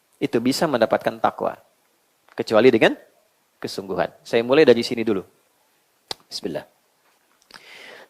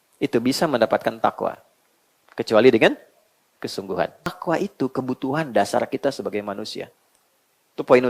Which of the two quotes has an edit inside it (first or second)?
second